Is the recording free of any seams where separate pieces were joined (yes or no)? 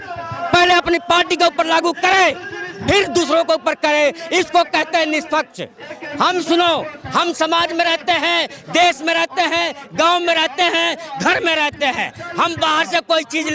yes